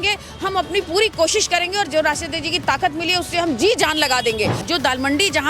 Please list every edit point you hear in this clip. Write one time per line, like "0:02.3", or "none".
0:04.6